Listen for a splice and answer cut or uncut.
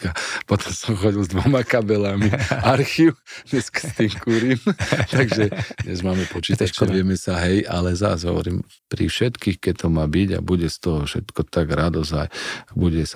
cut